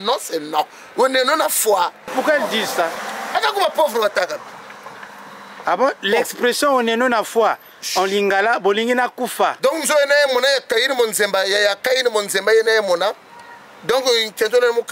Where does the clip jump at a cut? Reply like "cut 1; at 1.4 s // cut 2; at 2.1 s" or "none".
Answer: cut 1; at 2.1 s // cut 2; at 3.1 s